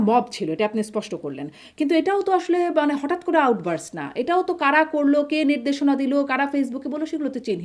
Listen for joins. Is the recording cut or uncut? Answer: uncut